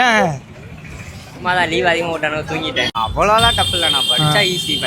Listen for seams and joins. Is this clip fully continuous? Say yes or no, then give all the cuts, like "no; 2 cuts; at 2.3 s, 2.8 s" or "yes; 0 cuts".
no; 1 cut; at 3.0 s